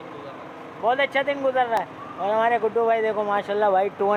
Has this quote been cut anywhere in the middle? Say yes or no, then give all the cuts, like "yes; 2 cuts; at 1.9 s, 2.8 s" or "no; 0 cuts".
no; 0 cuts